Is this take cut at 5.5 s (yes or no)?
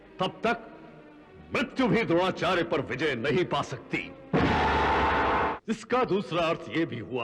yes